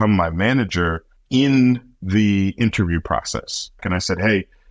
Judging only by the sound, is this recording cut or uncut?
cut